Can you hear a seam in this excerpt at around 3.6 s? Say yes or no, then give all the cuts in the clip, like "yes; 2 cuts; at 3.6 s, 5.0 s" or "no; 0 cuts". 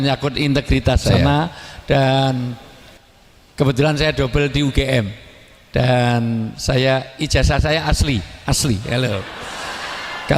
no; 1 cut; at 1.2 s